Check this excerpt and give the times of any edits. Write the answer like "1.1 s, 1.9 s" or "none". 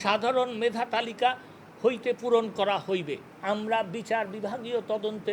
3.3 s